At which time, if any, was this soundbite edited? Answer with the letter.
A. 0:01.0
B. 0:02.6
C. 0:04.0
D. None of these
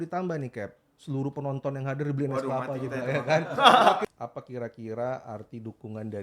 C